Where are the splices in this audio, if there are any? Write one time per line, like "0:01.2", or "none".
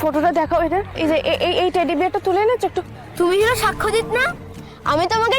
0:03.0